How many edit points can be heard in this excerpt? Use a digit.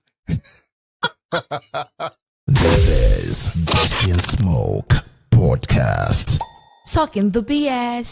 1